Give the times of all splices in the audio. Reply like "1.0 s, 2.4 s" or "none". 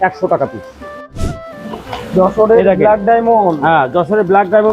1.0 s